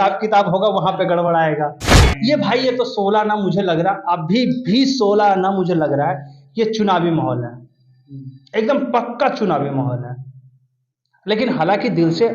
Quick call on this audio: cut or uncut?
cut